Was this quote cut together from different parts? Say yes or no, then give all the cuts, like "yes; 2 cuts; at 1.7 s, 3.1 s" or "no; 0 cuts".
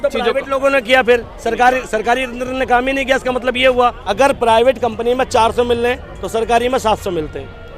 yes; 1 cut; at 4.0 s